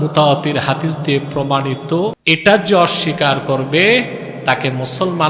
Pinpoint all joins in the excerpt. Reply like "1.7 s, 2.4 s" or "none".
2.2 s